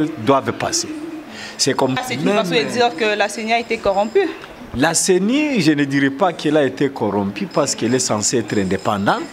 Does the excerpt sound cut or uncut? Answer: cut